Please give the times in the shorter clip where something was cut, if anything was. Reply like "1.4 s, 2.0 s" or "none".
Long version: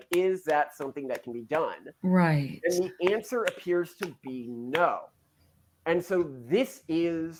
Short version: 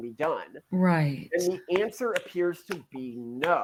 none